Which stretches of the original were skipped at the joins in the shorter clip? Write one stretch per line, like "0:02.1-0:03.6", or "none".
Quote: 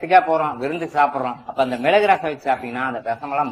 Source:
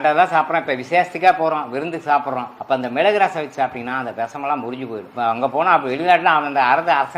none